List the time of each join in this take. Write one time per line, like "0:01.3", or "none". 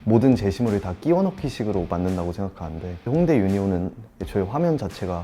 none